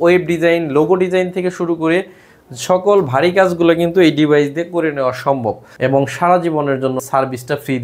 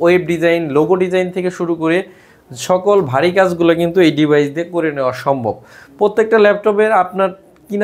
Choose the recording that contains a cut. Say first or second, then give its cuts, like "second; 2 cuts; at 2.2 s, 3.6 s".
first; 1 cut; at 5.8 s